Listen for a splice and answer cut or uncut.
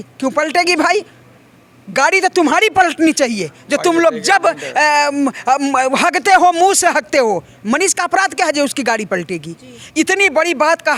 uncut